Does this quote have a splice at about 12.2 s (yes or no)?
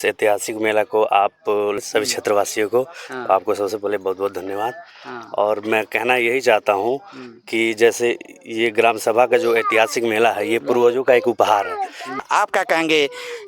yes